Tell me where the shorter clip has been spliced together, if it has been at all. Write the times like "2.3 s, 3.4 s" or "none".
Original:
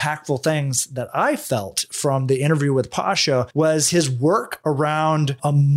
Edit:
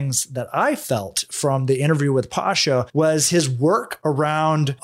none